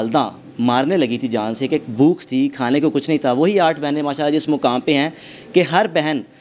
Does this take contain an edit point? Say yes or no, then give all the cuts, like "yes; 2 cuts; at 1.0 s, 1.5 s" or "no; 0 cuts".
no; 0 cuts